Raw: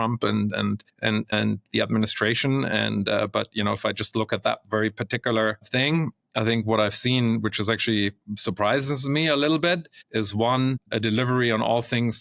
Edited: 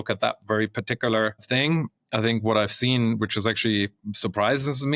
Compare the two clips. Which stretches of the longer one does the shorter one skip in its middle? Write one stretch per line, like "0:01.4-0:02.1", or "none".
none